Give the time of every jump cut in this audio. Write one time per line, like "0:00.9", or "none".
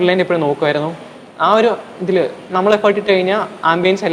none